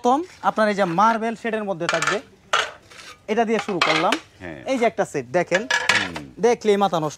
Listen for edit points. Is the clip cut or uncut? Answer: uncut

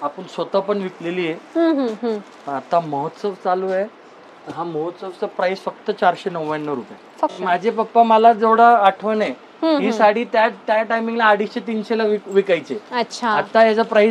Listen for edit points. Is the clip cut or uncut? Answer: cut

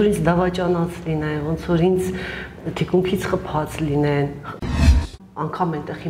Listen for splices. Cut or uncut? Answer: cut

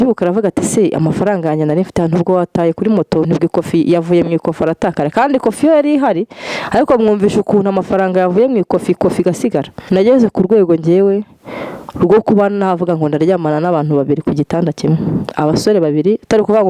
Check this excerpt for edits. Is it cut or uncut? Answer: cut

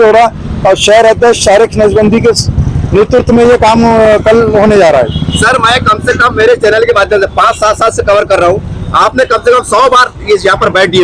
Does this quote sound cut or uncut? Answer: uncut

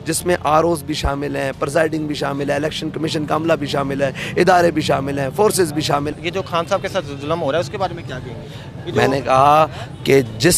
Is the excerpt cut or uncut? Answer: cut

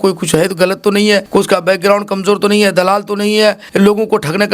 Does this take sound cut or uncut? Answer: cut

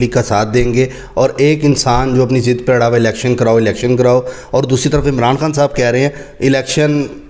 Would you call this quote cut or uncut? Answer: uncut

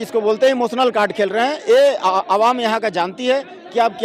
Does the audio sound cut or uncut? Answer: uncut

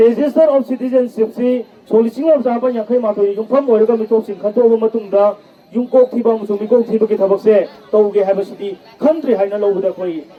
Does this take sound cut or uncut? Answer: uncut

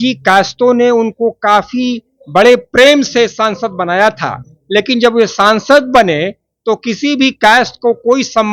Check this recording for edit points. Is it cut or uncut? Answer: uncut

